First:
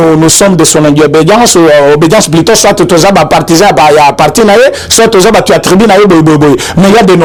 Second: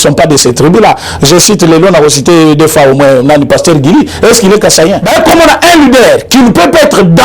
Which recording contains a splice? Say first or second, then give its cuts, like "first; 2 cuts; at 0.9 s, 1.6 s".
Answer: second; 1 cut; at 5.0 s